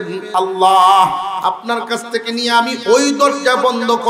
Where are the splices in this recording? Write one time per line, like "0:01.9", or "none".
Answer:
0:01.4